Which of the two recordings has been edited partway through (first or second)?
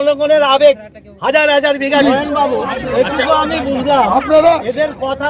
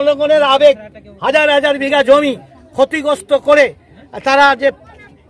first